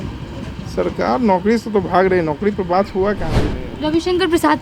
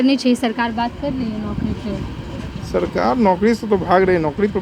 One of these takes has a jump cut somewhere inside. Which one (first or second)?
first